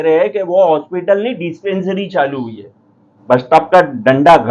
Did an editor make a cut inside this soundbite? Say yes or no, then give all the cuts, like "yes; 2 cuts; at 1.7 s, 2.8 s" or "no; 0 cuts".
yes; 1 cut; at 3.1 s